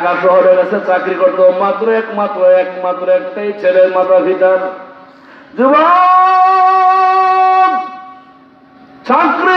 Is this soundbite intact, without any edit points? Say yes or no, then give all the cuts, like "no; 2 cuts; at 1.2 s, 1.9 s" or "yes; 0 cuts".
yes; 0 cuts